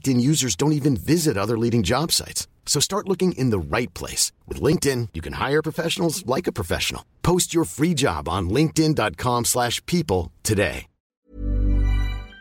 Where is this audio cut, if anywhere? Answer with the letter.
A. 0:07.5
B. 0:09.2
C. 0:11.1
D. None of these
C